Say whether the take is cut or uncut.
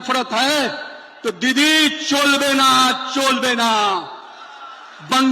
uncut